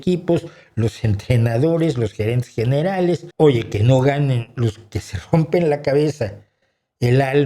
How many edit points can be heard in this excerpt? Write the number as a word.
one